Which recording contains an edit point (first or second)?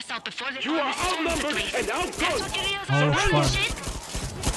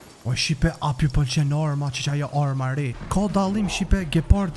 second